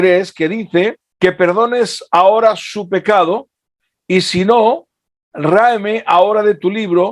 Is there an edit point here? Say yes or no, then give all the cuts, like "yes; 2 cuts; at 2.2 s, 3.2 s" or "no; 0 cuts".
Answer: yes; 1 cut; at 1.0 s